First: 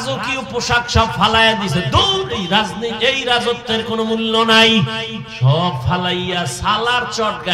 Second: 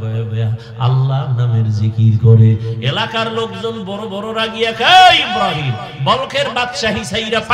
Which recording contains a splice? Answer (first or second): first